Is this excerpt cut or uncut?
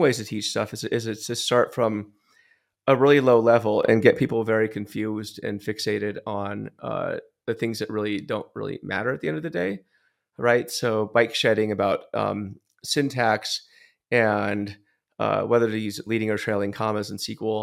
uncut